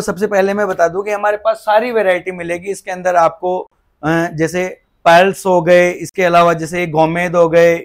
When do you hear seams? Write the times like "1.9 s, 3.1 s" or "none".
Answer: none